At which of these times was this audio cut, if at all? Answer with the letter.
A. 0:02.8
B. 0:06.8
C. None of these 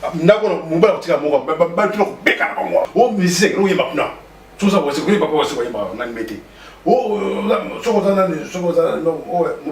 A